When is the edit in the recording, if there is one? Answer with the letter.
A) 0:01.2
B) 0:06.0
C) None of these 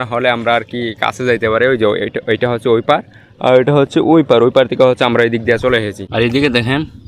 B